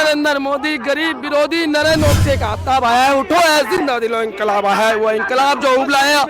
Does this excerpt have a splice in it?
yes; 1 cut; at 2.0 s

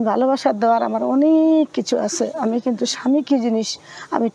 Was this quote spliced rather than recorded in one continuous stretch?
no; 0 cuts

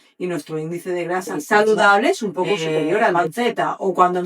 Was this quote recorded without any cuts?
no; 1 cut; at 3.1 s

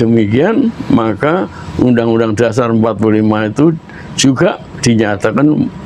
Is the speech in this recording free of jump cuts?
yes; 0 cuts

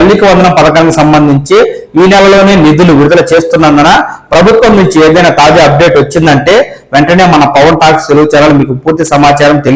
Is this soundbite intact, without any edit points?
yes; 0 cuts

